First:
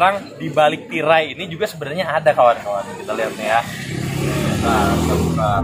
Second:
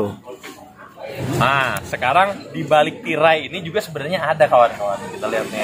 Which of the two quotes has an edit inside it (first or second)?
second